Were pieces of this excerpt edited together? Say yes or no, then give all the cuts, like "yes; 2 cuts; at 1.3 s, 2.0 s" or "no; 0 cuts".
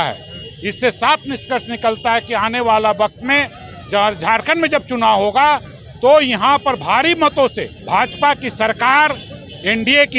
yes; 1 cut; at 7.7 s